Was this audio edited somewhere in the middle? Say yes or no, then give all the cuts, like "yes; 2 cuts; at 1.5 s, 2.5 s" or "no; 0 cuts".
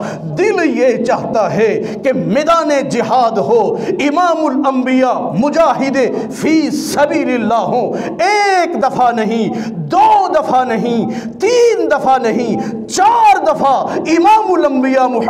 no; 0 cuts